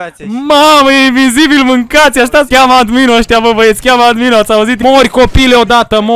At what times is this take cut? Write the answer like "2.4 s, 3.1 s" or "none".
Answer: 2.5 s, 4.8 s